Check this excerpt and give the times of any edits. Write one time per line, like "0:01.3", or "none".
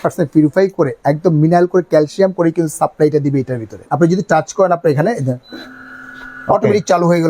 0:03.8